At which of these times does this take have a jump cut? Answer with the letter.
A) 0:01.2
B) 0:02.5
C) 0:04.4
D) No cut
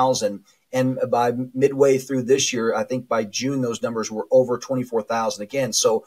D